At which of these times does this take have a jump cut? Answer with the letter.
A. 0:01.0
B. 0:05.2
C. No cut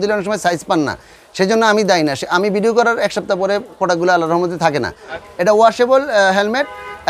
B